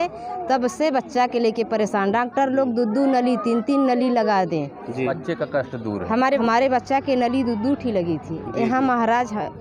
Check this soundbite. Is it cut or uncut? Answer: cut